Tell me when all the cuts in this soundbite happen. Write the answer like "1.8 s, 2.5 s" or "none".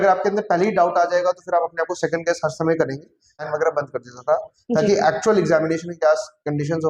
3.4 s